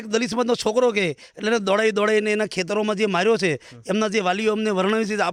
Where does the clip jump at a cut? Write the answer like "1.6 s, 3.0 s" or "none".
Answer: none